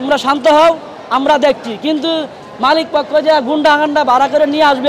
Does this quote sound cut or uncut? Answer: uncut